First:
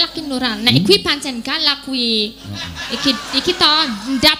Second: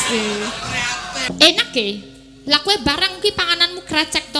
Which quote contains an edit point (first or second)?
second